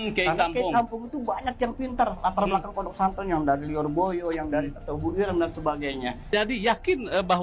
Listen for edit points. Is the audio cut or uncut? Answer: cut